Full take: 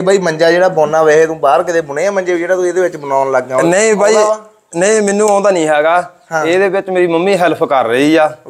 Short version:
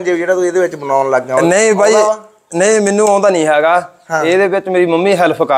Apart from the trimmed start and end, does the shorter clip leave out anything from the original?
no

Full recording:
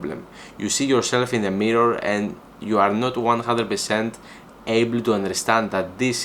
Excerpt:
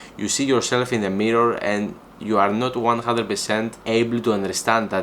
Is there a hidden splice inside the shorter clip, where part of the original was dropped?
yes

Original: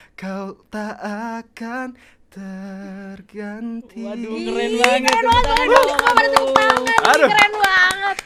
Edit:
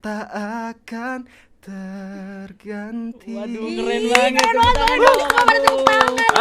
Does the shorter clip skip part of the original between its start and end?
no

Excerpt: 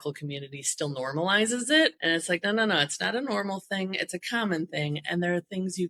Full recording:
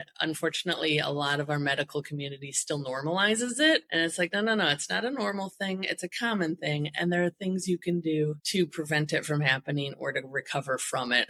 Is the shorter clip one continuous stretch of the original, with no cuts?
yes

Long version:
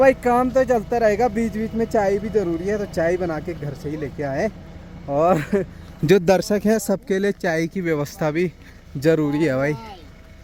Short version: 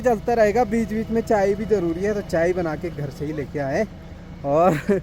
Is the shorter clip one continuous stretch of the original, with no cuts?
yes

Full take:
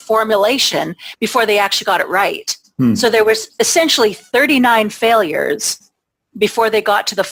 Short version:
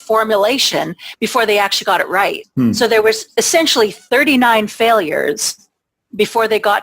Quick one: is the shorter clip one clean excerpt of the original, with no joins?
no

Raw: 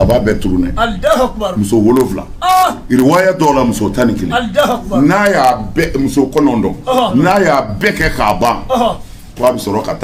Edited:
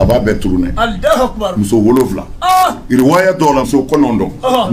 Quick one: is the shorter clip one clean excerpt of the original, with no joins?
no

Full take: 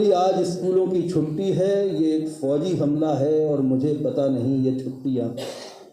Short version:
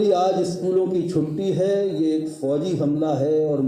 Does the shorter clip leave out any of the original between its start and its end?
no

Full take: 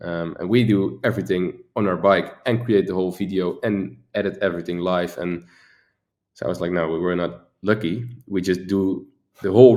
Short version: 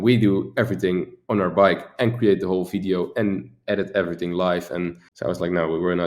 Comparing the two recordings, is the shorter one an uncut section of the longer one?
no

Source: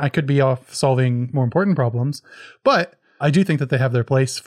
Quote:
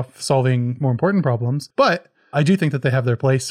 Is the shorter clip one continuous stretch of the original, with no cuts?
no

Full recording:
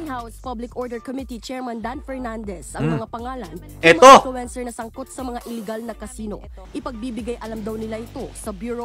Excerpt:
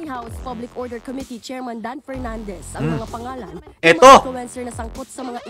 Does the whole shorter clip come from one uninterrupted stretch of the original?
yes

